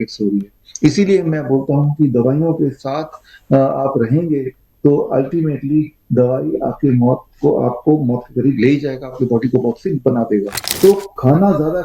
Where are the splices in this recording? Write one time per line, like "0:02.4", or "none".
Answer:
0:10.6